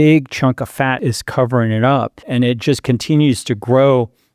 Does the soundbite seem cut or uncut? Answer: cut